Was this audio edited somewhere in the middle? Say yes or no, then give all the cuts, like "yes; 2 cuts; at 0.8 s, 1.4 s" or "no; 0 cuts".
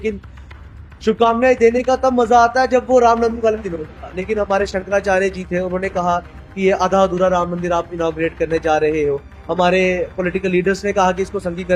no; 0 cuts